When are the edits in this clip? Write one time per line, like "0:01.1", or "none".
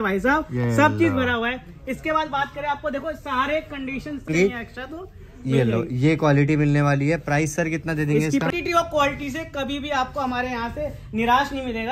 0:04.3
0:08.5